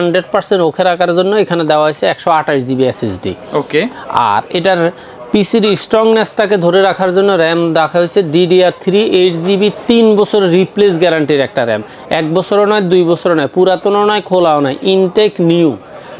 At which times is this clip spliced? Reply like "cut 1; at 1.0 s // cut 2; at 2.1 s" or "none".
none